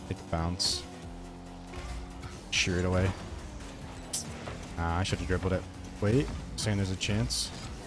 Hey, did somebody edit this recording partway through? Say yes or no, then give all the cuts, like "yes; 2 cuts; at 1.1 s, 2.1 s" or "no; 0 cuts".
no; 0 cuts